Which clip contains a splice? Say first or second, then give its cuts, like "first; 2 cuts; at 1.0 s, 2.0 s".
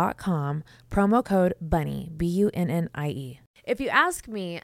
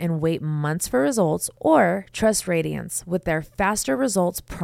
first; 1 cut; at 3.5 s